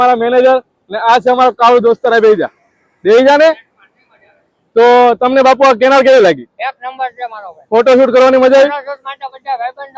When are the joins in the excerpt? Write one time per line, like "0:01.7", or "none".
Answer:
none